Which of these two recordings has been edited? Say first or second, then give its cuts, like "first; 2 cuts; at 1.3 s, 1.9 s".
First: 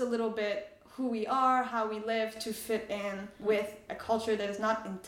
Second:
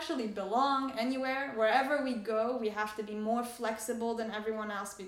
first; 1 cut; at 3.3 s